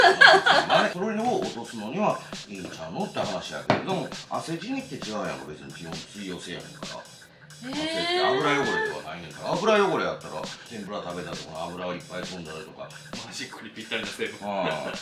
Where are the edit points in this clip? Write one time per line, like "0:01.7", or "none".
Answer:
0:00.9
0:10.6
0:13.1